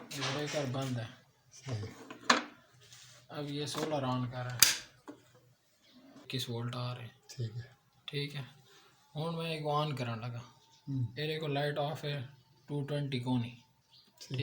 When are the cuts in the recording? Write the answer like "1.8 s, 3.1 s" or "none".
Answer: 6.3 s